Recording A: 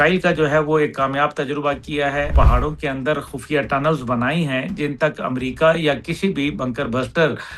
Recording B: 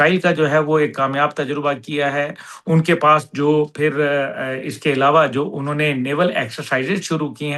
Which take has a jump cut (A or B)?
A